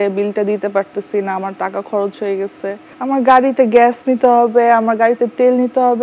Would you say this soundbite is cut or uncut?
uncut